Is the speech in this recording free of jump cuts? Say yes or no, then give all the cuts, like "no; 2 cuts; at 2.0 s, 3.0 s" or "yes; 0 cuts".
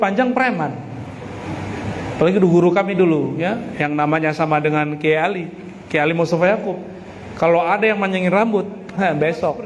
yes; 0 cuts